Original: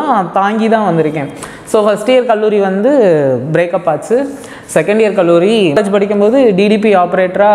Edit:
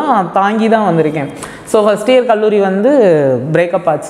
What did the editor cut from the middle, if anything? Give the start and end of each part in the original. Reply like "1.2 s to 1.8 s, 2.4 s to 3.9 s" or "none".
none

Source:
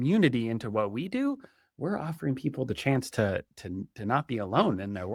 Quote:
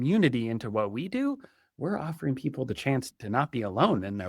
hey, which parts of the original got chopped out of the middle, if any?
3.1 s to 3.8 s

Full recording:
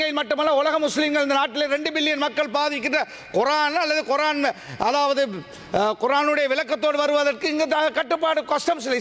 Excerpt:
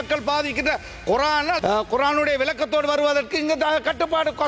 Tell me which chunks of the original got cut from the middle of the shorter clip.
3.8 s to 5.7 s

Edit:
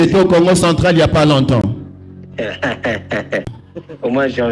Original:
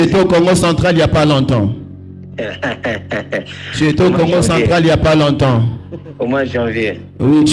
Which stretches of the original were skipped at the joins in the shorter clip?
3.6 s to 5.8 s

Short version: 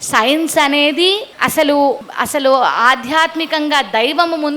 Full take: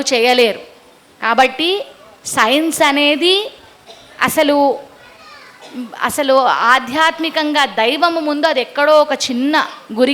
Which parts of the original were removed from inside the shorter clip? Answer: 3.5 s to 4.1 s, 4.9 s to 5.9 s

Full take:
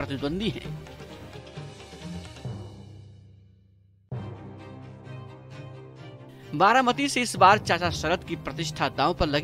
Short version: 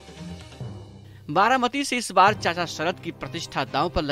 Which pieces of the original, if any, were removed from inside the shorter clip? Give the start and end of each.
3.1 s to 6.5 s

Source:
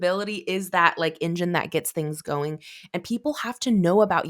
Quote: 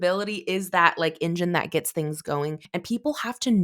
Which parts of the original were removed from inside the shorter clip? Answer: 2.6 s to 2.8 s

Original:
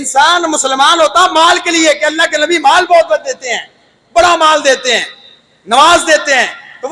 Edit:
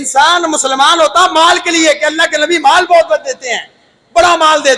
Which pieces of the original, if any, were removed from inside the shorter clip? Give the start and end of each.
none

